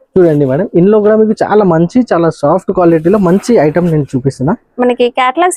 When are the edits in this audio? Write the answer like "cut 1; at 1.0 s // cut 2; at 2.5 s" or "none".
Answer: none